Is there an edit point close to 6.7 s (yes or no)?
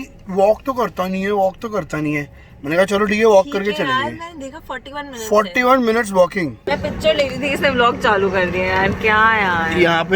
yes